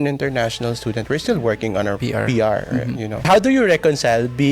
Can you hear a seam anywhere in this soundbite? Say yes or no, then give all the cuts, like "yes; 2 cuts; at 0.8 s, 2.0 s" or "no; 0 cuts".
yes; 2 cuts; at 2.0 s, 3.3 s